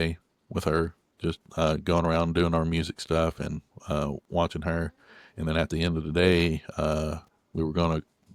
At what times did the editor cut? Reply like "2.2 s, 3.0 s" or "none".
none